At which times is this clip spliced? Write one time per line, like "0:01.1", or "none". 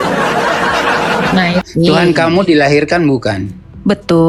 0:01.6